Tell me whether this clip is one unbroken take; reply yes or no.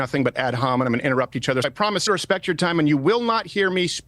no